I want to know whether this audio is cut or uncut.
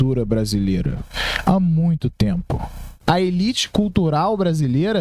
cut